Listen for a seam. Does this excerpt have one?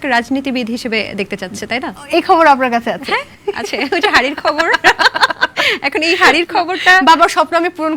no; 0 cuts

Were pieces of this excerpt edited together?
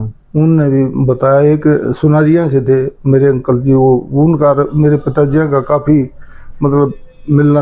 no; 0 cuts

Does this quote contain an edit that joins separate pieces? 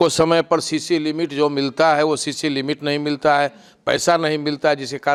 no; 0 cuts

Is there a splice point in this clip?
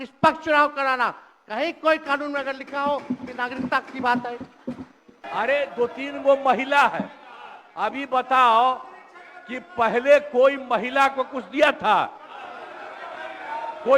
yes; 1 cut; at 5.2 s

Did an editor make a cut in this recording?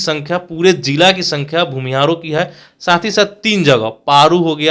no; 0 cuts

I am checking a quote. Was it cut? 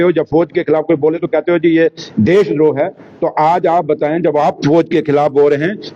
no; 0 cuts

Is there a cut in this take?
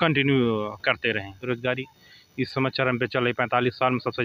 yes; 1 cut; at 1.4 s

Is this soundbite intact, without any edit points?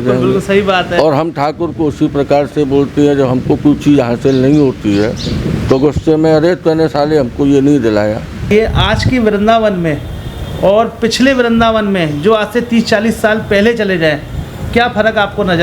no; 1 cut; at 8.5 s

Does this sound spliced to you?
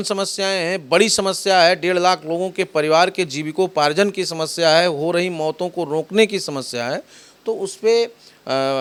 no; 0 cuts

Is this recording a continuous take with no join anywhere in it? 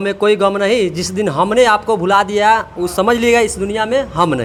yes; 0 cuts

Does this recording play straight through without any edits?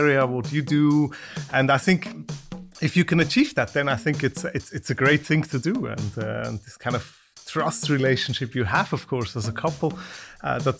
yes; 0 cuts

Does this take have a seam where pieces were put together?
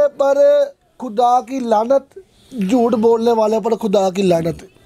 no; 0 cuts

